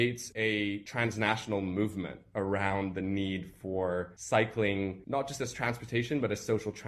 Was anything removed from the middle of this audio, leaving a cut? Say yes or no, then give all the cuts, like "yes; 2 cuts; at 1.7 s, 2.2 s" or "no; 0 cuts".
yes; 2 cuts; at 4.2 s, 5.0 s